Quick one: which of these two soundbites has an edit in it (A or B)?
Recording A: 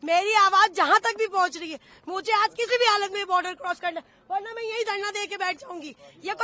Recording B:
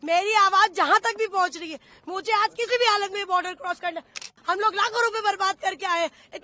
B